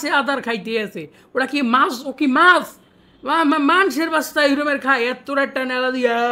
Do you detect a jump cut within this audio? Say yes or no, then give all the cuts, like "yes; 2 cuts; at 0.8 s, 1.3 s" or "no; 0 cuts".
no; 0 cuts